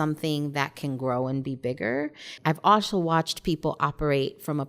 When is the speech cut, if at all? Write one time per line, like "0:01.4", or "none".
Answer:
0:02.3